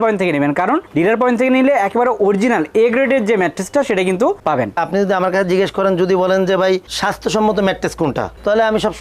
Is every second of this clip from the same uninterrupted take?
no; 1 cut; at 4.7 s

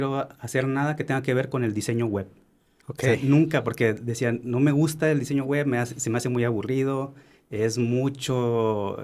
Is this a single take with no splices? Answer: yes; 0 cuts

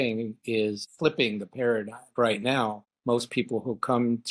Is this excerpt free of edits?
no; 3 cuts; at 0.9 s, 2.1 s, 2.9 s

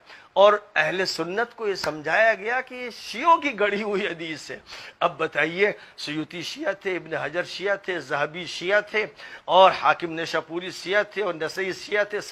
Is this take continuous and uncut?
yes; 0 cuts

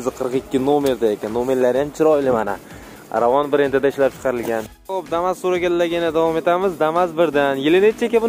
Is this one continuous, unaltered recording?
no; 1 cut; at 4.5 s

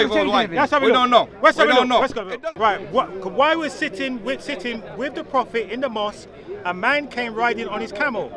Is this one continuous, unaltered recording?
no; 1 cut; at 2.2 s

